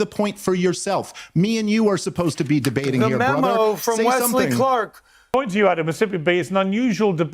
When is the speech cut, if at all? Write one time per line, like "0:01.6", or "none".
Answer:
0:05.3